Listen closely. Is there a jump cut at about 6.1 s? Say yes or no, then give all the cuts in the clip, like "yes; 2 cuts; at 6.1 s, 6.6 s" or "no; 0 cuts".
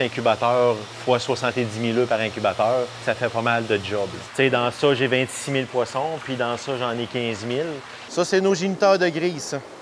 no; 4 cuts; at 0.9 s, 3.0 s, 4.2 s, 8.0 s